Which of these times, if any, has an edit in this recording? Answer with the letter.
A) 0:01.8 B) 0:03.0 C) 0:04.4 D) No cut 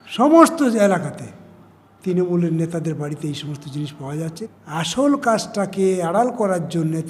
C